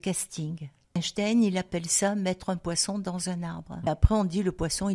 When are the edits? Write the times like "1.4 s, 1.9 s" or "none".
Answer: 1.0 s, 3.9 s